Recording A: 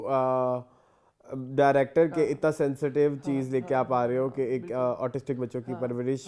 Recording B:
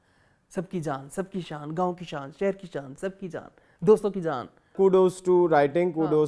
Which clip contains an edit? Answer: B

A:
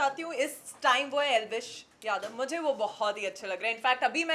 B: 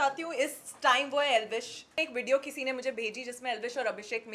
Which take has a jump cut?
B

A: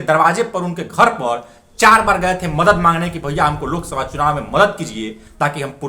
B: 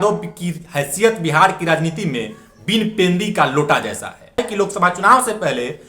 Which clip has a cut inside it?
B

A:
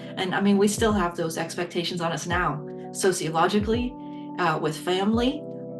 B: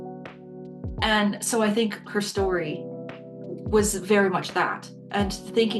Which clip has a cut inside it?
B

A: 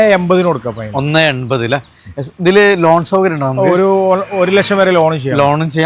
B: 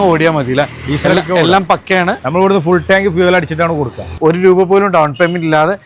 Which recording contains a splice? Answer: B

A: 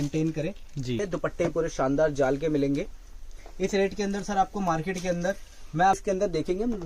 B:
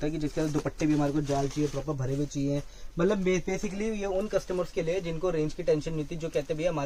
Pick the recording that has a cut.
A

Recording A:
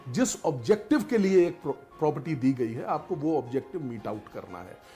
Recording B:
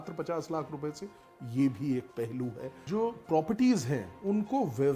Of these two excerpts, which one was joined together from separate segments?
B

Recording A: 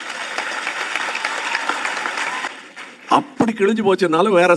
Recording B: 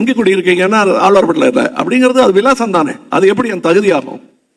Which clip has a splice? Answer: A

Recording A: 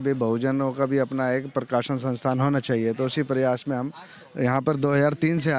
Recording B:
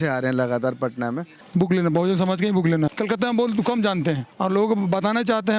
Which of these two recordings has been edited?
B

